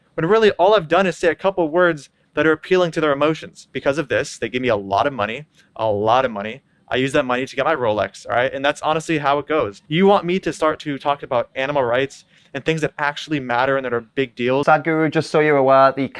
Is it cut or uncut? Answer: cut